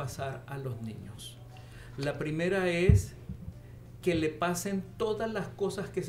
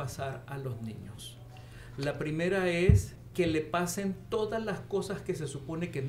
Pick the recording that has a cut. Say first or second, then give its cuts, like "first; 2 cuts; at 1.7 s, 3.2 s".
second; 1 cut; at 3.2 s